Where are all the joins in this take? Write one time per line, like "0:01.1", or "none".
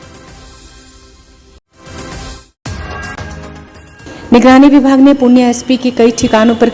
0:01.4